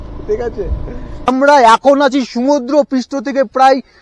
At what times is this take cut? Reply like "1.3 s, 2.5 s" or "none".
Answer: 1.3 s